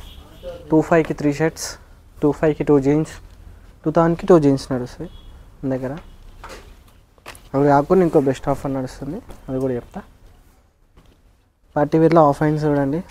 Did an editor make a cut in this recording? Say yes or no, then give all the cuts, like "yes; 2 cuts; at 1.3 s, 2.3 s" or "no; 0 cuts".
no; 0 cuts